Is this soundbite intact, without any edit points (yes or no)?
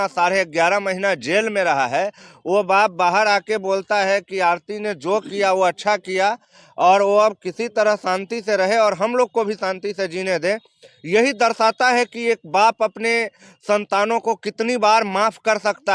yes